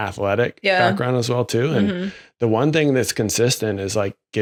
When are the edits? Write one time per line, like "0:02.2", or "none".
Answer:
none